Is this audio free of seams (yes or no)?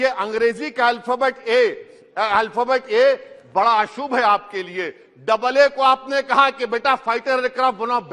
yes